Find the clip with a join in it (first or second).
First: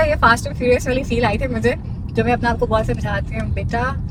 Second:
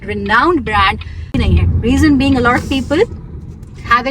second